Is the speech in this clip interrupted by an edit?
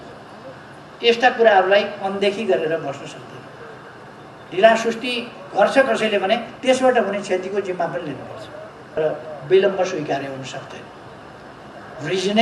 yes; 1 cut; at 9.0 s

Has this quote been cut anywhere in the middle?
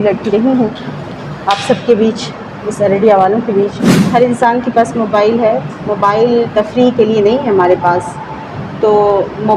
yes; 1 cut; at 3.9 s

